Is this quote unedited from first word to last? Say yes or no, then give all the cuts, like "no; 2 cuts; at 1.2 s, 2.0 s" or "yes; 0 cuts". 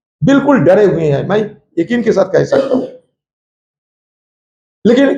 yes; 0 cuts